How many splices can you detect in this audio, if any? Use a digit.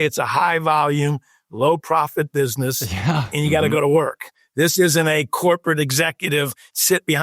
1